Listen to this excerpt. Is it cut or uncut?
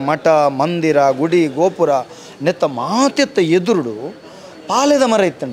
uncut